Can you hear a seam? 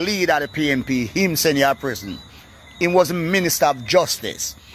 no; 0 cuts

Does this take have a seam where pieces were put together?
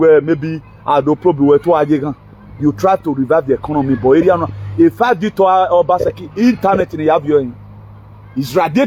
no; 0 cuts

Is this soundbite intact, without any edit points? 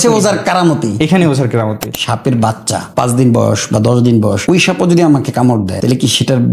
no; 4 cuts; at 2.0 s, 2.8 s, 4.4 s, 5.7 s

